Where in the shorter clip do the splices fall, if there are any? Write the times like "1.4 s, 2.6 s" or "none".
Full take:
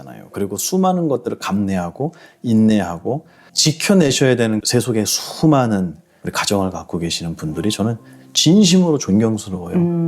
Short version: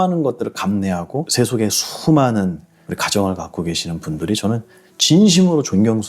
1.3 s

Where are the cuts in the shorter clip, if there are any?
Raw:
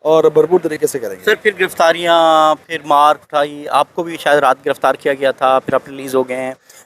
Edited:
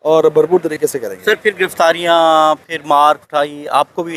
none

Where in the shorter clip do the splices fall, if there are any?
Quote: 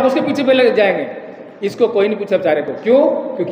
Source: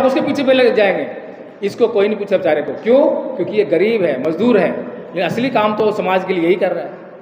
none

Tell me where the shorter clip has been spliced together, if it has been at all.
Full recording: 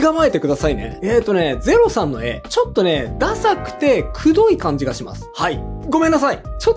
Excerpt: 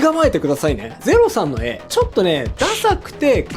1.0 s

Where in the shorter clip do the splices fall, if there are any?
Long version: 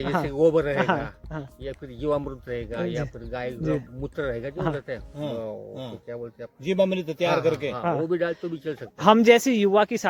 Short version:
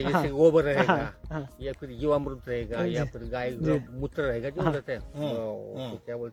none

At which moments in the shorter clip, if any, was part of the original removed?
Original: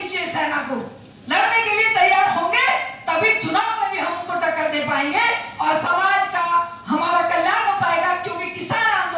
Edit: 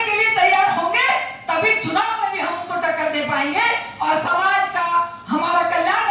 none

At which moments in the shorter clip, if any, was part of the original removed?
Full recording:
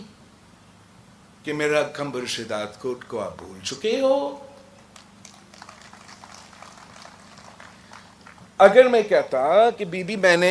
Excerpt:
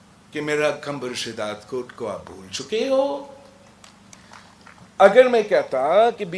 4.2 s

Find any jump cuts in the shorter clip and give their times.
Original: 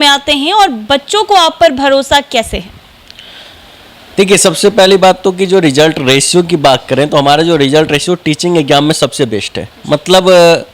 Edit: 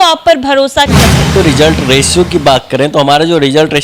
1.4 s

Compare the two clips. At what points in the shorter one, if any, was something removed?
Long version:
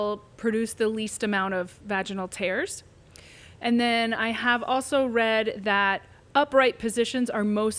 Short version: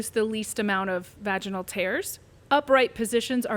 2.3 s

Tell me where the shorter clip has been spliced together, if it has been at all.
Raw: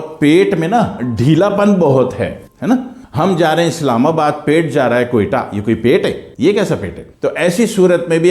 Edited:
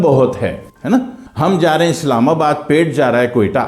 none

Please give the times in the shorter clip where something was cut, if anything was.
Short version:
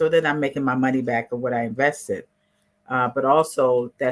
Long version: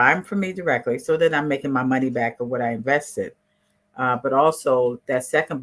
none

